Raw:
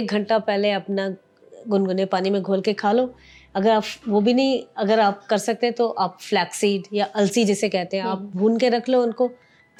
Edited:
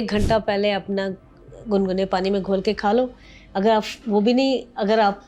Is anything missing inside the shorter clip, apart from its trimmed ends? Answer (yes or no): no